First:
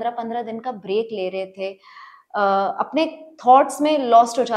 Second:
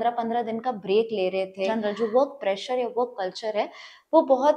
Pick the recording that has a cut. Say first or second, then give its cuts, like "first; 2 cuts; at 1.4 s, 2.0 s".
second; 1 cut; at 1.7 s